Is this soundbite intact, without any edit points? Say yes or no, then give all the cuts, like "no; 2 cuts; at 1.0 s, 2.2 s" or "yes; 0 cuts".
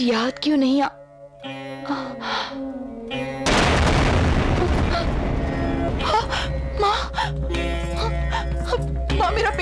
no; 1 cut; at 5.9 s